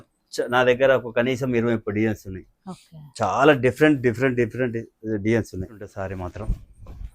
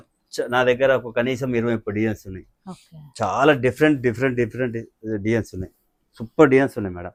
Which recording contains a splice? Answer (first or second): first